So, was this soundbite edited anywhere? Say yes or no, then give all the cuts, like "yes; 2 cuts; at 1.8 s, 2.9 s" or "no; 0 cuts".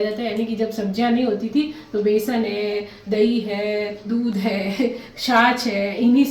no; 0 cuts